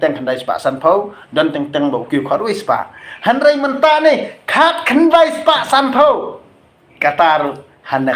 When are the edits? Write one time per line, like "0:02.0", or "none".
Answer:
none